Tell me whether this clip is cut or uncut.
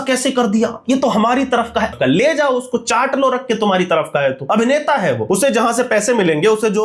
cut